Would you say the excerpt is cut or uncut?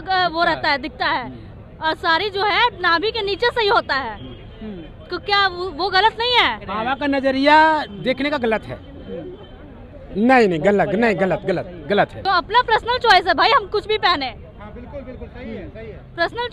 cut